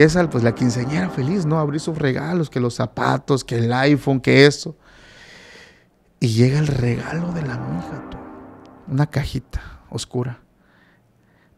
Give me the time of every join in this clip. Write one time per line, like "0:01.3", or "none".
none